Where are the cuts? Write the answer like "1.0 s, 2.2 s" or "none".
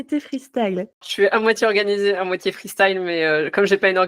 1.1 s